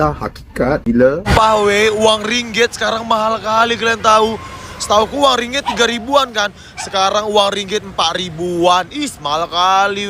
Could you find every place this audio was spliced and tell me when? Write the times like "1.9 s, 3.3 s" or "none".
1.3 s